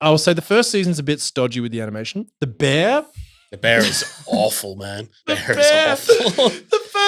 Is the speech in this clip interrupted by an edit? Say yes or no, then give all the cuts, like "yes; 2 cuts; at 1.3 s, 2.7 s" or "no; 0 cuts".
no; 0 cuts